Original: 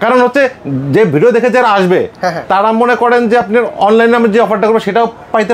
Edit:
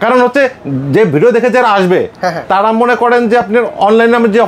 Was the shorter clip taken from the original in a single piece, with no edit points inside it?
yes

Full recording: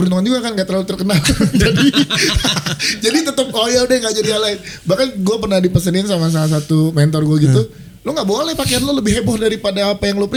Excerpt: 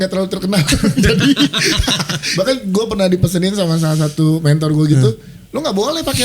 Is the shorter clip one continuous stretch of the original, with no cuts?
no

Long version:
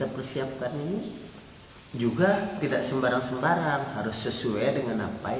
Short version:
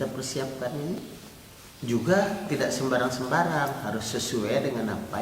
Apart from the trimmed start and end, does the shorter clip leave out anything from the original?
yes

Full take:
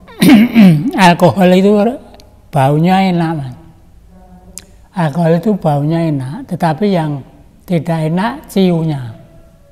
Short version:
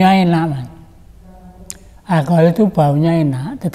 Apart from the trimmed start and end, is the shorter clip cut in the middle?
no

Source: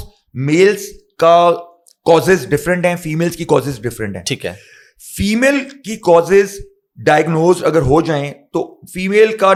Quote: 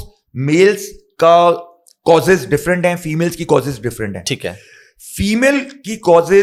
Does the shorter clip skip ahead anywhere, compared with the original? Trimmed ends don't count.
no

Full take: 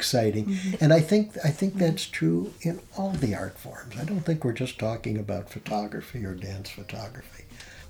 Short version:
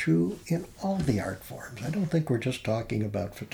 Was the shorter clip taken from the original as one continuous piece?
yes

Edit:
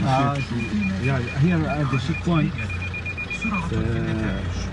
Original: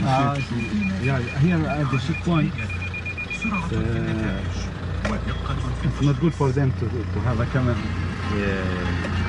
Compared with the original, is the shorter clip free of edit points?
yes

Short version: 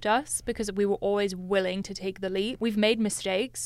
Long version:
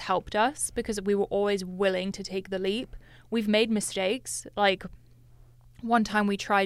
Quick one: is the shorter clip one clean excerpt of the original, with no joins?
no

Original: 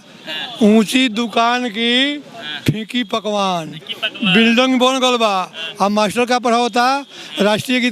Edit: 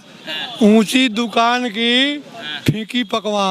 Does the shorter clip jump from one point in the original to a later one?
no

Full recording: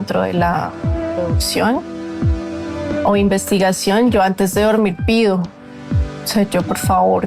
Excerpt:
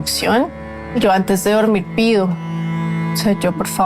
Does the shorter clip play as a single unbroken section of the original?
no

